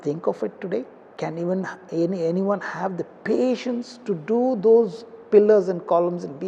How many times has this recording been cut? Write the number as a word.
one